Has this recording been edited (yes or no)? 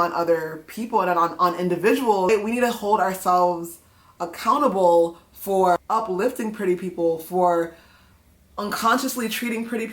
yes